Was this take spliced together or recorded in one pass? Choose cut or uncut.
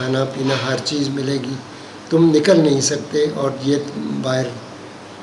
uncut